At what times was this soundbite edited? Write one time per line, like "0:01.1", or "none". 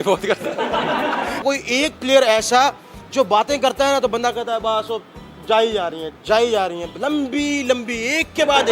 0:01.4